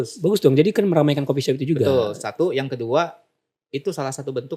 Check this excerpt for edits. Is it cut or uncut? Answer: uncut